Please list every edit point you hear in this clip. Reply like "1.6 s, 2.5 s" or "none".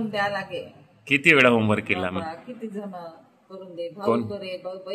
none